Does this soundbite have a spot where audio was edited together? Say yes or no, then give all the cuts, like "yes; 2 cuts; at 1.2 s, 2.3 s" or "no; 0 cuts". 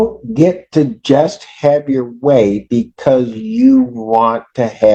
no; 0 cuts